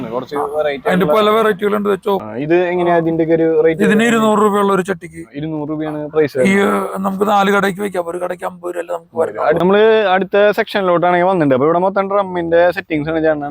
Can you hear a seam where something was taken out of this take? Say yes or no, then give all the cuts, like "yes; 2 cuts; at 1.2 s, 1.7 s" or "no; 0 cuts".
yes; 2 cuts; at 2.3 s, 9.6 s